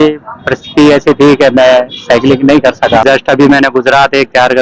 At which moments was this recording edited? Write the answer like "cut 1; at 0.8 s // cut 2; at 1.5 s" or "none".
cut 1; at 3.0 s